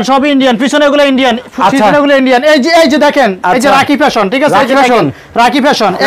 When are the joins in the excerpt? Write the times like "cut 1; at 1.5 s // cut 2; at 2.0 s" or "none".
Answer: none